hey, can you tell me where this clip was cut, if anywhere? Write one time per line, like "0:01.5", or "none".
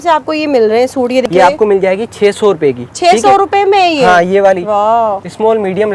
0:01.2